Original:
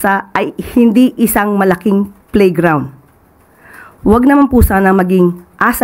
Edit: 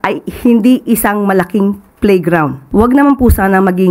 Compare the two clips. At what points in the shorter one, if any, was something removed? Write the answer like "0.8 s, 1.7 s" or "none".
2.6 s